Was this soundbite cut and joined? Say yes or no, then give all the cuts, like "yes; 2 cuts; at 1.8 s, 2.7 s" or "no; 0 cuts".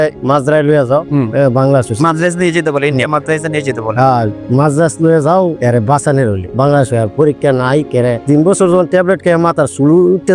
no; 0 cuts